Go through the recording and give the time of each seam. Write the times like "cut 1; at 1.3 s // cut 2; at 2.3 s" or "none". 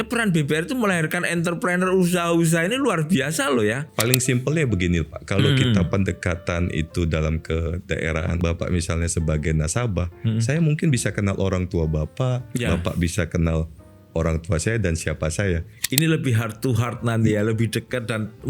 cut 1; at 3.8 s // cut 2; at 8.4 s // cut 3; at 15.7 s